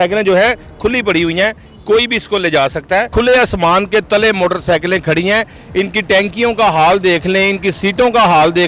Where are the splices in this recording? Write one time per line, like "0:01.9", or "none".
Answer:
0:03.1